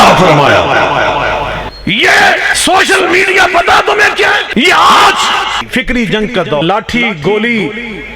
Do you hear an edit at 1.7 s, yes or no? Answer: yes